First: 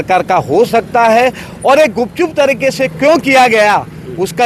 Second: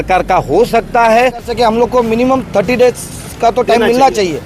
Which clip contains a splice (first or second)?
second